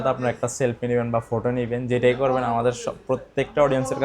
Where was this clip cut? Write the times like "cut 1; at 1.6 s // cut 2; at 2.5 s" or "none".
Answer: none